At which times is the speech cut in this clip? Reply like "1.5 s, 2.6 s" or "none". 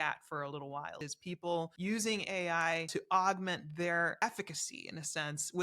1.5 s, 2.9 s, 4.2 s